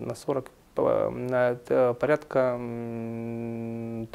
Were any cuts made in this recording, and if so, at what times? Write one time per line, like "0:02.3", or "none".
none